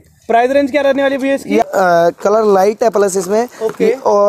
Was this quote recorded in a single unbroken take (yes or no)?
no